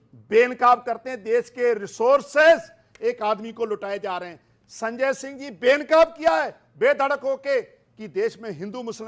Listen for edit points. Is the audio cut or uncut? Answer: uncut